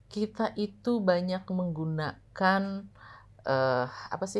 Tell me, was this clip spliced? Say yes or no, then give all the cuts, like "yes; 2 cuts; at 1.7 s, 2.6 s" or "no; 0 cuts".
no; 0 cuts